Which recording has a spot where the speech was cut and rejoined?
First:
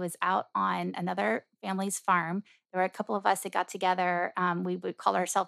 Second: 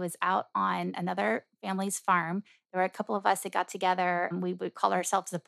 second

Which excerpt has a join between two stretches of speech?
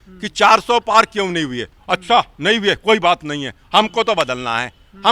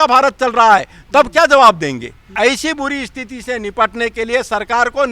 second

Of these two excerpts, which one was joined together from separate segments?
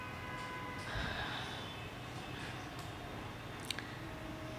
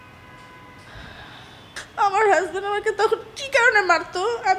second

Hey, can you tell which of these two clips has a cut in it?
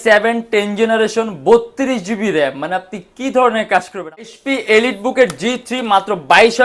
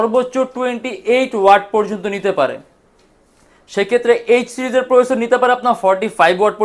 first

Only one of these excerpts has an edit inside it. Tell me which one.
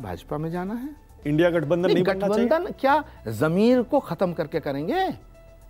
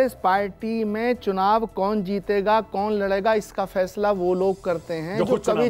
first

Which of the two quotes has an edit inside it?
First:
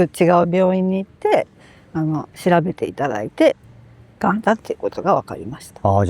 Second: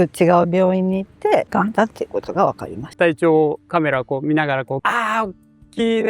second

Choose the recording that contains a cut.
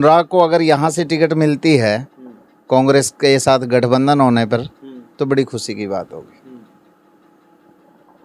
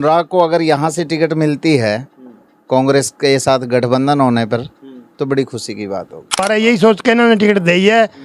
second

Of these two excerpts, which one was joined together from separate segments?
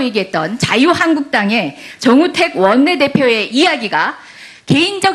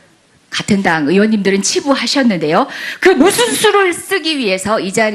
second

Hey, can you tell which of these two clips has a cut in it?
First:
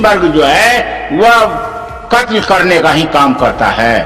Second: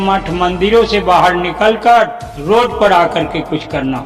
second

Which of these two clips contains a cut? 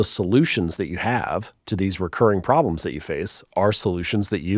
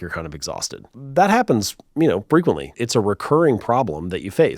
second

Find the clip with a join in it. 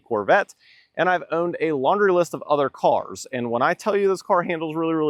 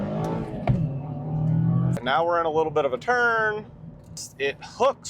second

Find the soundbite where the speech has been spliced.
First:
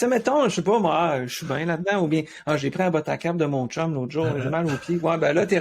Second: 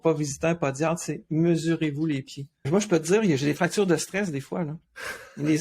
second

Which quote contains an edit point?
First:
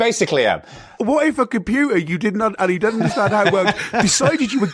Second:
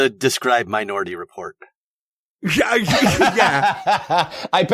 first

